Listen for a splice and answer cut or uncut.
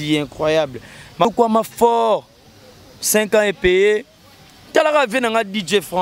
cut